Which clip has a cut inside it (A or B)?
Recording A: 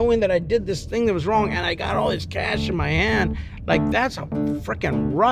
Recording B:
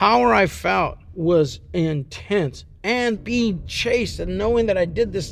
B